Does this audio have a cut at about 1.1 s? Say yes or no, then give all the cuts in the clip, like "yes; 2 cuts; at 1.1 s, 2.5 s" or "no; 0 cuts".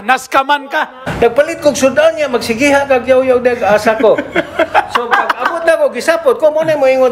yes; 1 cut; at 1.1 s